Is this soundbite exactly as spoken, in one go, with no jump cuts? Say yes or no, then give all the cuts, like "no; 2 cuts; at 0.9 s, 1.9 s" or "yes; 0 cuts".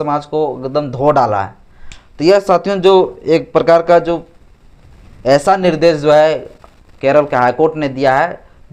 yes; 0 cuts